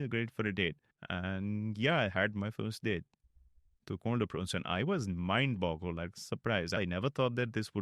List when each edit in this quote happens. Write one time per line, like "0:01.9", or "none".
0:06.8